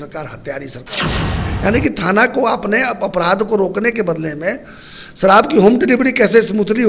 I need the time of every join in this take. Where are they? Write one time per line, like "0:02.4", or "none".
0:01.2